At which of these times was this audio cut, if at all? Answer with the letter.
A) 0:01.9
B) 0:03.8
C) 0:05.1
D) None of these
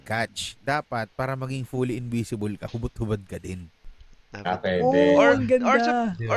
B